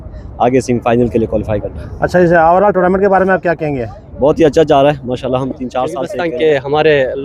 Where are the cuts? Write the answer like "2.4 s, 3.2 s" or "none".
6.1 s

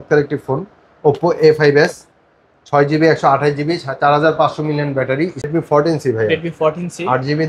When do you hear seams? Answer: 5.5 s

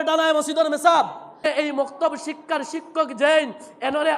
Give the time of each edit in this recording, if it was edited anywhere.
1.4 s

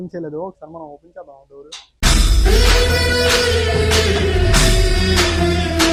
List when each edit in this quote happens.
none

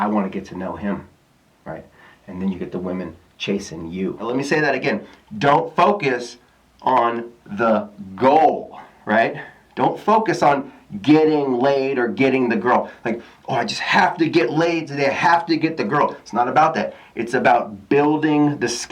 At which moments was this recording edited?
4.3 s

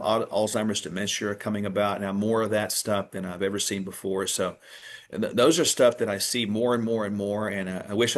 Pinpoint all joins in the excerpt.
none

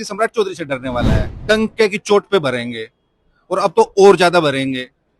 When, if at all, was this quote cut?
1.3 s

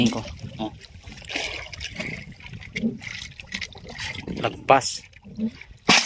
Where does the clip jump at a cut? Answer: 1.8 s

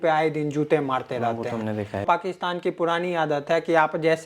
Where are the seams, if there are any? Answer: 2.0 s

